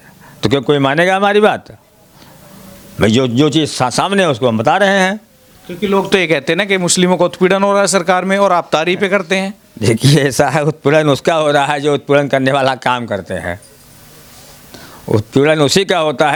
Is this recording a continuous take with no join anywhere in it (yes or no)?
yes